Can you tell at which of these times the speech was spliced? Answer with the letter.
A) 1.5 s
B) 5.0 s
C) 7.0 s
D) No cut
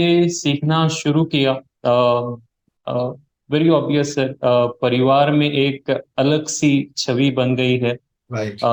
D